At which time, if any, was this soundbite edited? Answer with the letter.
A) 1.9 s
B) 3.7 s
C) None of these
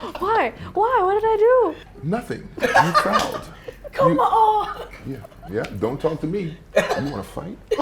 A